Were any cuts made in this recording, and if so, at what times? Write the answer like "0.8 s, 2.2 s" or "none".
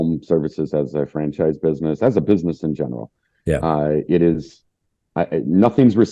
none